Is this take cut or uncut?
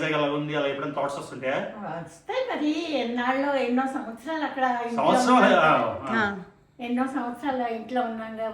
uncut